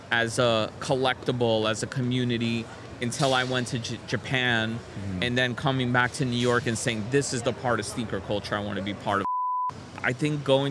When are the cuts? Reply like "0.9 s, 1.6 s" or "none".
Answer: 9.3 s